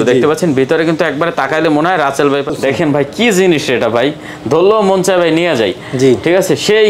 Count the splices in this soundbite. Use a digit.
1